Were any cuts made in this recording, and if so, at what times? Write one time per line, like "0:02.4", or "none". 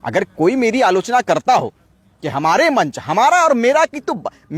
none